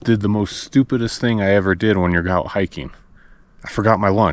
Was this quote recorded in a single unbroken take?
yes; 0 cuts

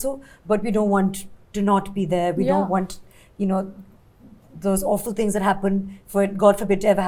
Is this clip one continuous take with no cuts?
yes; 0 cuts

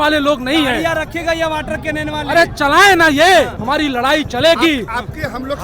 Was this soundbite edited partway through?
yes; 1 cut; at 3.6 s

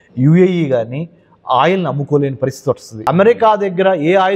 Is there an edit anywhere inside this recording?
yes; 1 cut; at 2.9 s

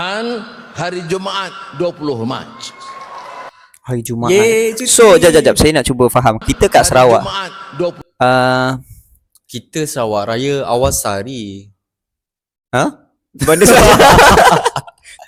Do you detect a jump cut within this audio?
no; 0 cuts

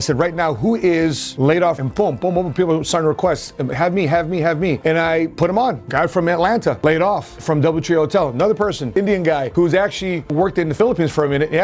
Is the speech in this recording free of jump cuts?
no; 1 cut; at 1.8 s

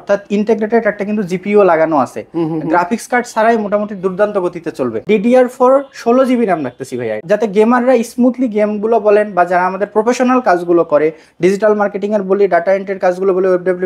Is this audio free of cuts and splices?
no; 2 cuts; at 5.0 s, 7.2 s

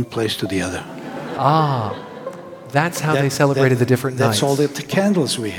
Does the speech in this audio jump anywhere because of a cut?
no; 0 cuts

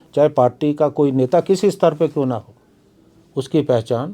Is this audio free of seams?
yes; 0 cuts

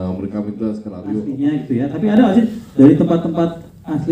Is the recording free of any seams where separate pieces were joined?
no; 1 cut; at 1.1 s

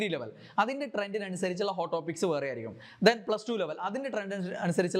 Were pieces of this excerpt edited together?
no; 0 cuts

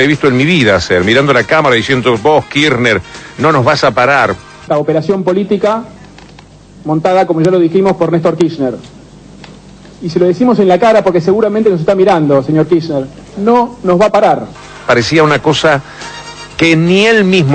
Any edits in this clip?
yes; 1 cut; at 14.5 s

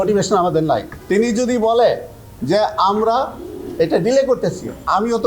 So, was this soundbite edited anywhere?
yes; 1 cut; at 0.9 s

